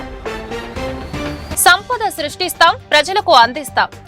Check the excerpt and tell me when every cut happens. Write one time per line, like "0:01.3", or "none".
0:01.6